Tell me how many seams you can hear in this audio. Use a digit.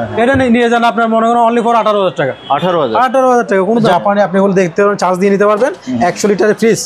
1